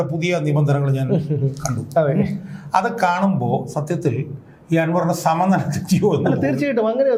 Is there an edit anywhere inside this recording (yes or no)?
no